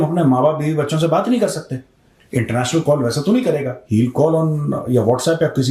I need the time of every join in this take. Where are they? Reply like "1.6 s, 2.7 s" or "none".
none